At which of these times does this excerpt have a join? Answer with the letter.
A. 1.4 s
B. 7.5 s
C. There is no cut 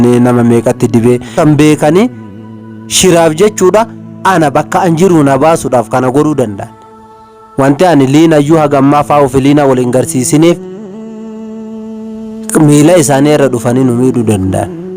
A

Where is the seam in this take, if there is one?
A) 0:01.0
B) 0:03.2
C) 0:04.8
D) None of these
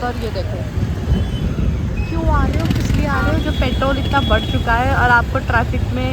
D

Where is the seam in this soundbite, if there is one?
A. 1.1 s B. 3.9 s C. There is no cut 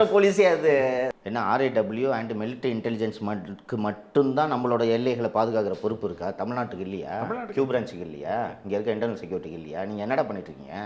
A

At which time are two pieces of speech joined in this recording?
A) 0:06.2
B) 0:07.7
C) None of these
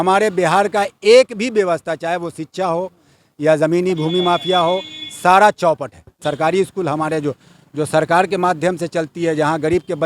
A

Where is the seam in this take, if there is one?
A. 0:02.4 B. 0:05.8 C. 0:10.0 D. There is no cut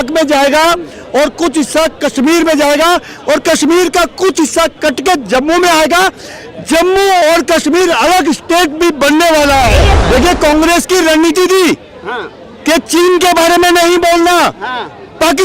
C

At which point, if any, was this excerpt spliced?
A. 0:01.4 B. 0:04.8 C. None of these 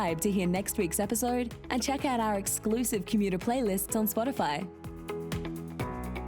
B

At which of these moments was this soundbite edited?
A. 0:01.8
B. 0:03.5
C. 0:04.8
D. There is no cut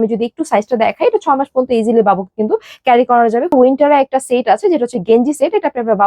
B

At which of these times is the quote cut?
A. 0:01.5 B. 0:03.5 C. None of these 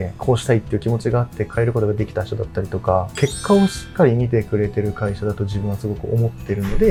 C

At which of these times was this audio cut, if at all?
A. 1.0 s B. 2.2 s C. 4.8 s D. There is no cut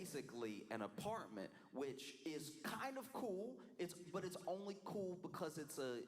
C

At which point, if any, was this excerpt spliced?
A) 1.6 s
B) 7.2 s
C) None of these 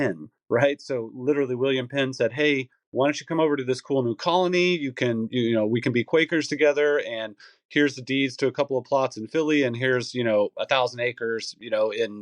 C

